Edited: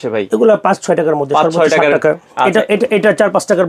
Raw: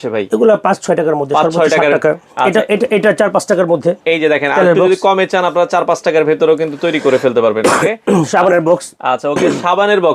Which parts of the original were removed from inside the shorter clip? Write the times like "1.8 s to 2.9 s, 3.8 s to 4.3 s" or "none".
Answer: none